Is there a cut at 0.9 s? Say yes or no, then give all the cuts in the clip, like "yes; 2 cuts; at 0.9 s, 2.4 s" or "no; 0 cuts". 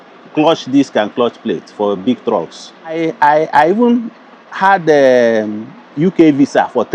no; 1 cut; at 3.0 s